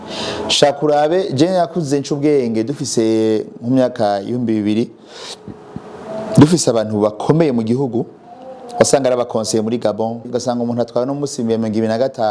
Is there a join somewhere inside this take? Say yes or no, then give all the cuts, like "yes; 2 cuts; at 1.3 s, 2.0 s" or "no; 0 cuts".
yes; 1 cut; at 10.3 s